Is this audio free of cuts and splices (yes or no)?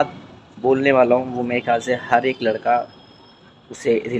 yes